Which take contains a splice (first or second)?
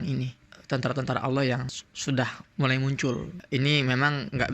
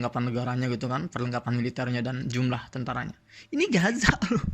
first